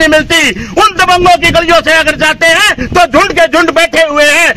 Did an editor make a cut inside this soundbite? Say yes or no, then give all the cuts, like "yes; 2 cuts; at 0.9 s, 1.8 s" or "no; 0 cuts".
no; 0 cuts